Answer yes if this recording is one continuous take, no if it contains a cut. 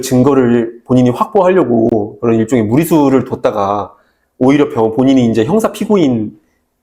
yes